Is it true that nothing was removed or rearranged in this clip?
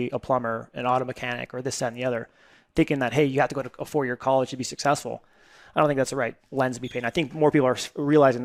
yes; 0 cuts

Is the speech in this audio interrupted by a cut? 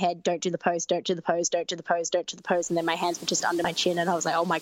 yes; 1 cut; at 3.6 s

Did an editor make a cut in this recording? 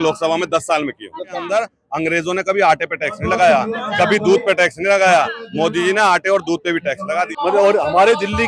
yes; 2 cuts; at 1.4 s, 7.3 s

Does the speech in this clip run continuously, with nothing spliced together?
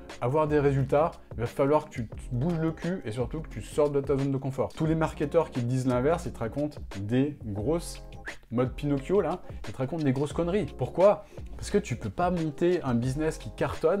yes; 0 cuts

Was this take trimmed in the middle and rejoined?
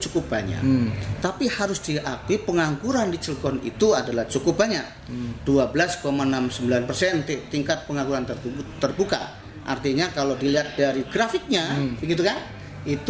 no; 0 cuts

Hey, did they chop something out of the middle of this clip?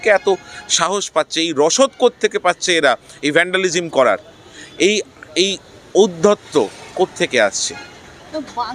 no; 0 cuts

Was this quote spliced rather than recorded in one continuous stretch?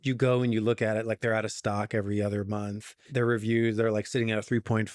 yes; 1 cut; at 3.0 s

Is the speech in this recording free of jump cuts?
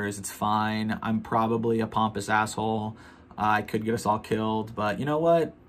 yes; 0 cuts

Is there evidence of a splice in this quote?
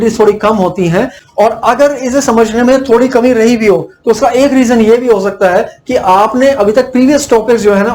yes; 1 cut; at 1.2 s

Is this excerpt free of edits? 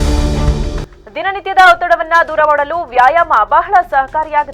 yes; 0 cuts

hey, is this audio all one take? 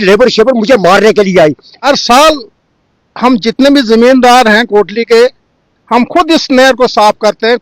no; 1 cut; at 1.7 s

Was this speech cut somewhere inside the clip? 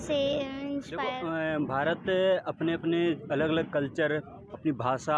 yes; 1 cut; at 1.1 s

